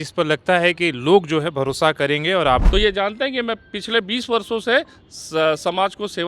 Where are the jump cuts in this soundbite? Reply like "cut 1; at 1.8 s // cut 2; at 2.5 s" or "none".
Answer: cut 1; at 2.6 s